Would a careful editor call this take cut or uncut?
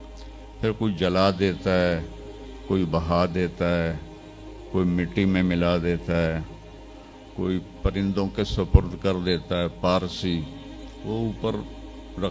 uncut